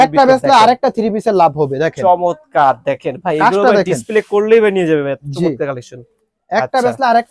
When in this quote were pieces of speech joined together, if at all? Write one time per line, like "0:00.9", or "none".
none